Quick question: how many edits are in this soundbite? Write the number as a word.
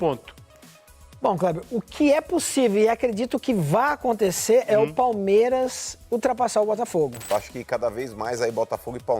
one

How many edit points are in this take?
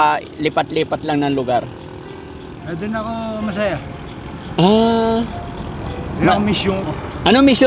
zero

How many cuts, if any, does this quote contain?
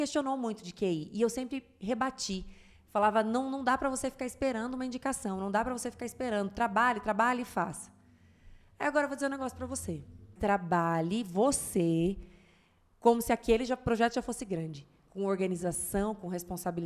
one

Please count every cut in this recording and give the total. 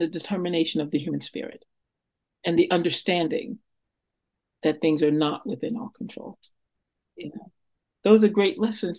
one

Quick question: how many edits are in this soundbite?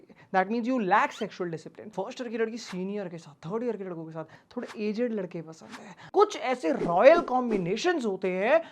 three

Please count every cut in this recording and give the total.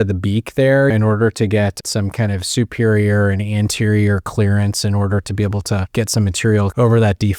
three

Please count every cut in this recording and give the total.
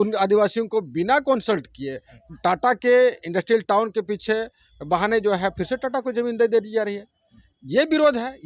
zero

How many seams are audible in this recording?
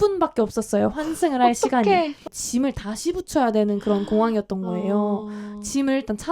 one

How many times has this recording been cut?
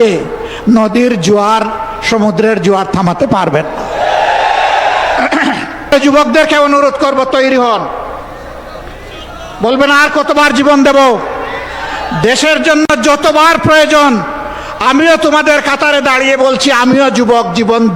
one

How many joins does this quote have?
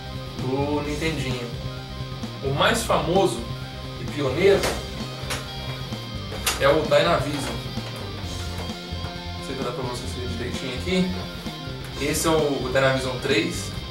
one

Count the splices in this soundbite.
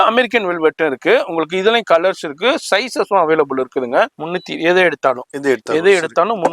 one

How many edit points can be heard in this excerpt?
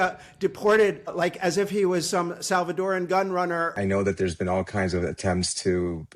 one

